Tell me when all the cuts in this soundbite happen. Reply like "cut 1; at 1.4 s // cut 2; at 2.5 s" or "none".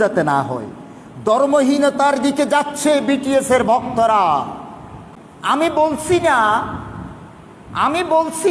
none